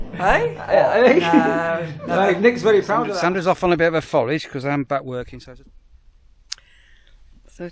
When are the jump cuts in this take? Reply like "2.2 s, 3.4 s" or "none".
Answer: 3.1 s, 5.3 s